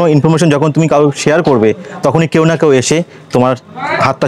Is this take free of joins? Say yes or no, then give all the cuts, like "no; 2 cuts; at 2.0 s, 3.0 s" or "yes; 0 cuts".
yes; 0 cuts